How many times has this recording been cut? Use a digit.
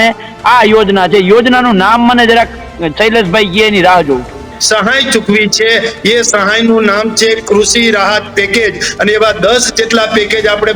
1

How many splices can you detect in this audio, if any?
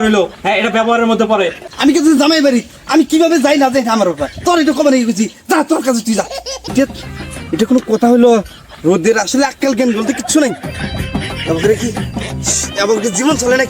2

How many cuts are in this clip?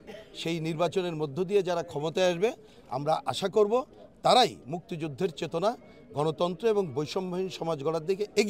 0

